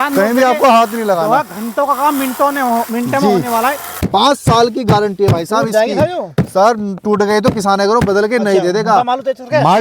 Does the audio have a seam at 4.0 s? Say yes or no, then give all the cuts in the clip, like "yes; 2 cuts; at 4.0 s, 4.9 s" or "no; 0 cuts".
yes; 1 cut; at 4.0 s